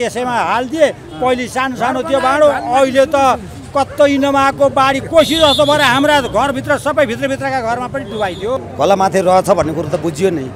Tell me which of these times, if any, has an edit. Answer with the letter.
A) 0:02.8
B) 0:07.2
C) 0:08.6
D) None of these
C